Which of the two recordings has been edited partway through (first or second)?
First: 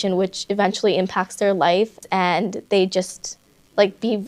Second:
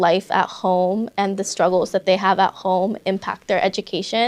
first